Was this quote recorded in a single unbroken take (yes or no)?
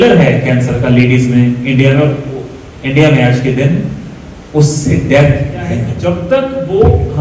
no